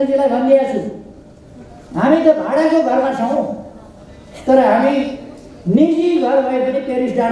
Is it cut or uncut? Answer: uncut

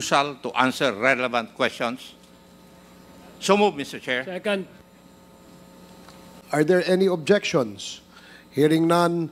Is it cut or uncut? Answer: cut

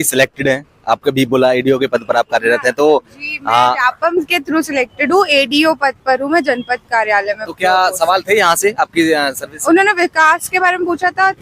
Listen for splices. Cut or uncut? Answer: uncut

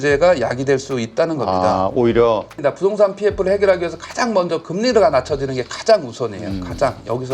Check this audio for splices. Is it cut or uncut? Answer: cut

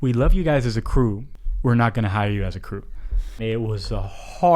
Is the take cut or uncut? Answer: cut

